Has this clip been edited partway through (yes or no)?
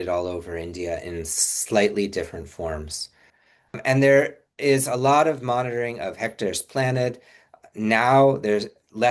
yes